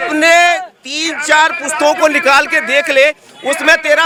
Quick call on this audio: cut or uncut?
uncut